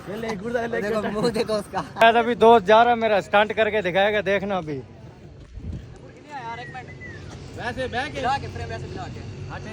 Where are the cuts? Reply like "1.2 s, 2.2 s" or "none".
2.0 s